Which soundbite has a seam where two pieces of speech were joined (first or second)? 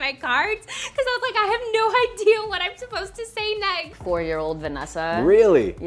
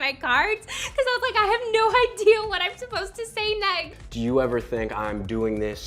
second